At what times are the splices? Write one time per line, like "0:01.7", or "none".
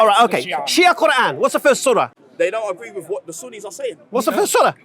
0:02.2